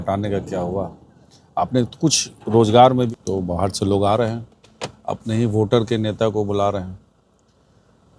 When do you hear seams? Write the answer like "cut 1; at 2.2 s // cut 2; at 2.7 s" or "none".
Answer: cut 1; at 3.1 s